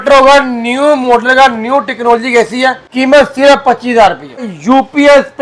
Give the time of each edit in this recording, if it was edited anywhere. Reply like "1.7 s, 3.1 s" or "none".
2.8 s, 4.5 s